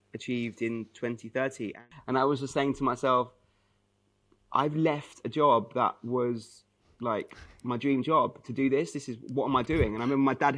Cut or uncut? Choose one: cut